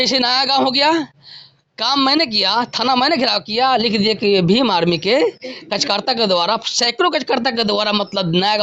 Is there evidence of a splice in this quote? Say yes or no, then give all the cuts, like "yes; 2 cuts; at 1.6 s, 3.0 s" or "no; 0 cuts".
no; 0 cuts